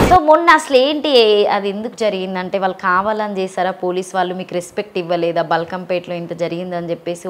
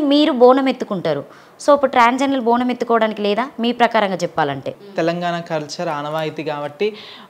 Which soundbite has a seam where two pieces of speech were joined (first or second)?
second